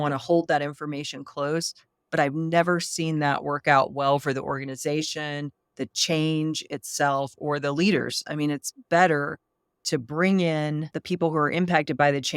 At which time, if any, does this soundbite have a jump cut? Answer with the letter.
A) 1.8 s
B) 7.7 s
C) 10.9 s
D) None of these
C